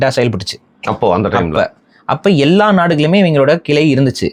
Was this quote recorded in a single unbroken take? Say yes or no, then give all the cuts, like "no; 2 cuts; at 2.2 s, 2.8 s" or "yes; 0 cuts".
yes; 0 cuts